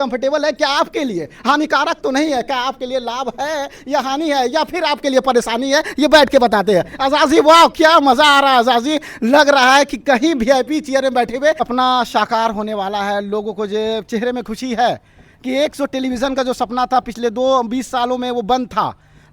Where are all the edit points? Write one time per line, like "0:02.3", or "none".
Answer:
0:11.6